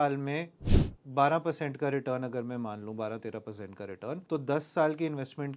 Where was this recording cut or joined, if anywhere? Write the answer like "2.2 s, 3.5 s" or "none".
4.2 s